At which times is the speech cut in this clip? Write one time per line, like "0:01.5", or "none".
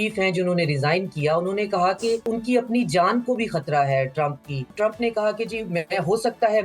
0:02.2
0:04.7